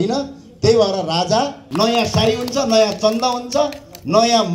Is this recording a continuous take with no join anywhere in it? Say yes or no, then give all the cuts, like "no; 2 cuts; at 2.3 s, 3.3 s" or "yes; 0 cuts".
no; 1 cut; at 1.6 s